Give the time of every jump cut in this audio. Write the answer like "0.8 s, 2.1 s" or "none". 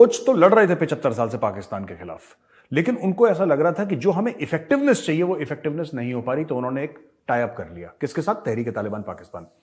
none